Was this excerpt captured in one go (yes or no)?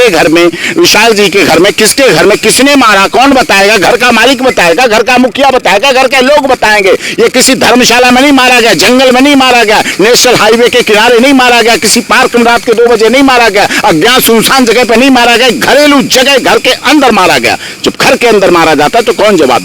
yes